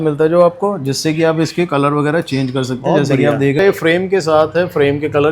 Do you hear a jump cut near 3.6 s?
yes; 1 cut; at 3.6 s

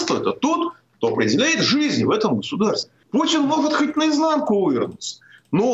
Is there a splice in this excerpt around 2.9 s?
yes; 1 cut; at 2.9 s

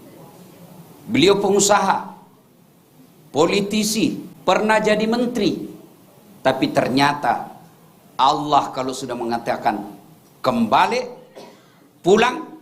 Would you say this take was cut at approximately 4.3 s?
yes; 1 cut; at 4.3 s

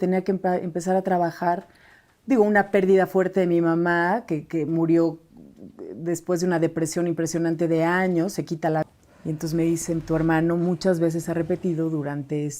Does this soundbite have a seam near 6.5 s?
no; 1 cut; at 8.8 s

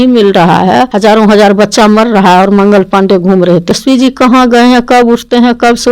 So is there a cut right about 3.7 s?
yes; 2 cuts; at 0.9 s, 3.7 s

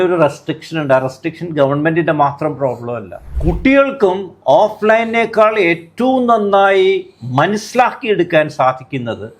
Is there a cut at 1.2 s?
no; 1 cut; at 3.3 s

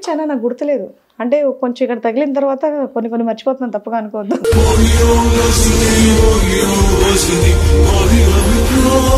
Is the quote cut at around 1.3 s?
no; 0 cuts

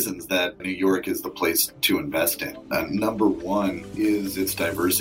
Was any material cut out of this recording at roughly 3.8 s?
yes; 3 cuts; at 1.7 s, 2.5 s, 3.8 s

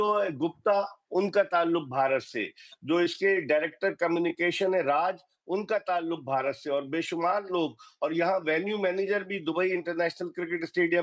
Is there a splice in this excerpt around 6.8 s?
no; 0 cuts

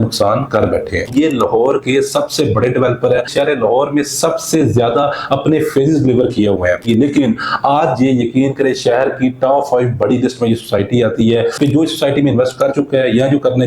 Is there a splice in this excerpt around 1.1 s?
yes; 4 cuts; at 1.1 s, 3.3 s, 6.8 s, 11.5 s

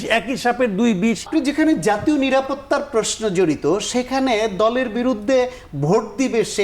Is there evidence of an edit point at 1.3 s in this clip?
yes; 1 cut; at 1.3 s

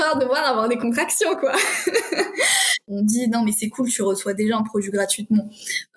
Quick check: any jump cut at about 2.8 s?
yes; 1 cut; at 2.8 s

